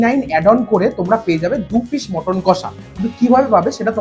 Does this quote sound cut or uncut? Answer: uncut